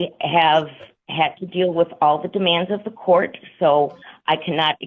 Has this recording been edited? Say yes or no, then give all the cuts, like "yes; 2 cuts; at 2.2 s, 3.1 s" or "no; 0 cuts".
no; 0 cuts